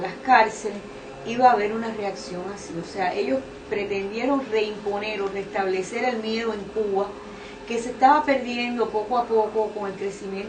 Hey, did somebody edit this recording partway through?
yes; 1 cut; at 9.2 s

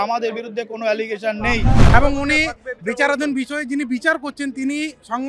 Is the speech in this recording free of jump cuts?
no; 1 cut; at 1.9 s

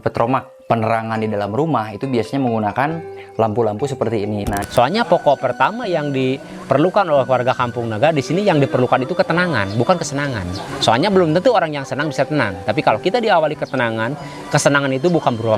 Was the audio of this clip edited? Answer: yes; 1 cut; at 4.6 s

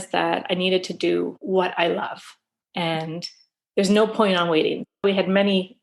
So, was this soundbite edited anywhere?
yes; 2 cuts; at 1.4 s, 4.8 s

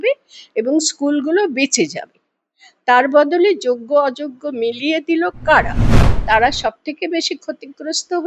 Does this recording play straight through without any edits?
no; 1 cut; at 6.1 s

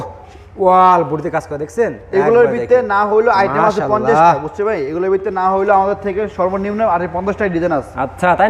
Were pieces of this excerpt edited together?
no; 0 cuts

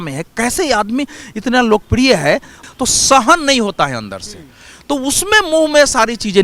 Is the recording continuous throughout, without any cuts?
no; 1 cut; at 2.6 s

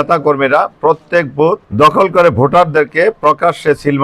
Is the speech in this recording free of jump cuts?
no; 1 cut; at 1.7 s

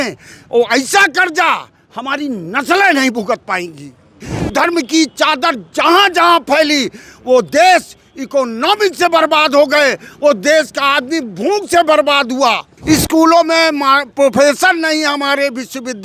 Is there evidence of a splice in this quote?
yes; 2 cuts; at 4.3 s, 12.7 s

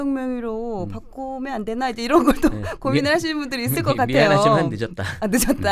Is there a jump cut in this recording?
no; 0 cuts

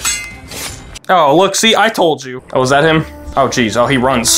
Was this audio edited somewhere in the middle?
yes; 2 cuts; at 2.3 s, 3.2 s

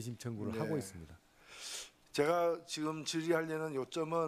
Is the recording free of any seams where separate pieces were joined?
no; 1 cut; at 2.8 s

